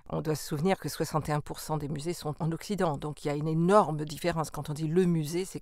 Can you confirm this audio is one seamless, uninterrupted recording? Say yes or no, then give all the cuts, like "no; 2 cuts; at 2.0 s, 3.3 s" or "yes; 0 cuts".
no; 1 cut; at 2.4 s